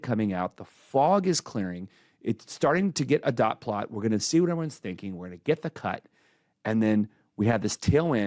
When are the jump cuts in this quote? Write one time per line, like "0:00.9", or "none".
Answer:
none